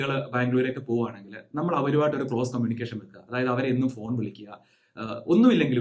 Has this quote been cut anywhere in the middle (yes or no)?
no